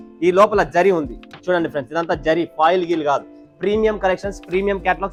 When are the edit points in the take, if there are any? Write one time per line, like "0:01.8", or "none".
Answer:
none